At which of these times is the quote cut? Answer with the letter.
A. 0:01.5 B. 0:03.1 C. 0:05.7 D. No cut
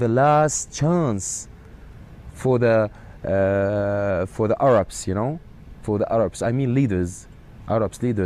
C